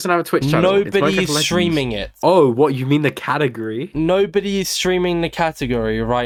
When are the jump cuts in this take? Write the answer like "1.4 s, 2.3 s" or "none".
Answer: none